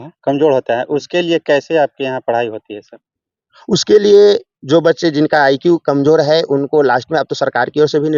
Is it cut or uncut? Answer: uncut